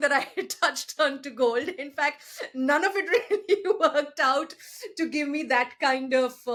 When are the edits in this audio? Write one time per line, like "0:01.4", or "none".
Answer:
none